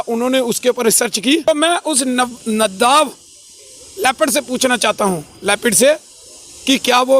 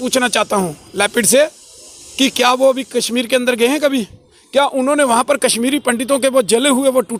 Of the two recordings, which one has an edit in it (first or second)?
first